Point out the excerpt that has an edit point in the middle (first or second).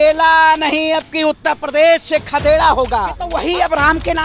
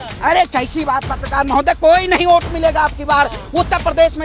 first